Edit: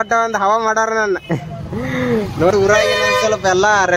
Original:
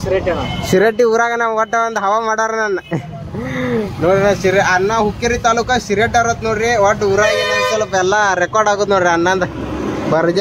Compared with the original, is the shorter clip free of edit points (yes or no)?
no